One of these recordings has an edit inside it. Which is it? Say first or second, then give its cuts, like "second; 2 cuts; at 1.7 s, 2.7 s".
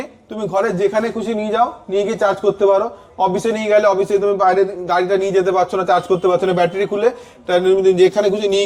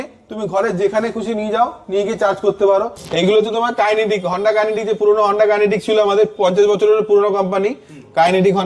second; 1 cut; at 3.0 s